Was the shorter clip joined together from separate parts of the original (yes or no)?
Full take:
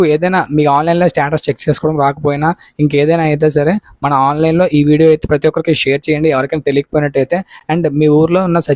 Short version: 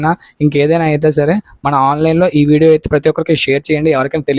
no